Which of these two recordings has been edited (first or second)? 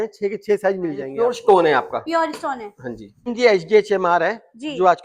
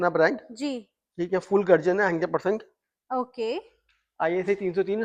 first